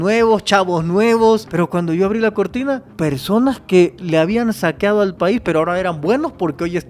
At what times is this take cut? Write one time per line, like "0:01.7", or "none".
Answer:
0:01.5
0:02.9